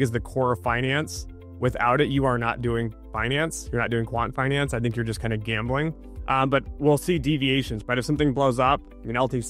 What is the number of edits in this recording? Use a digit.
2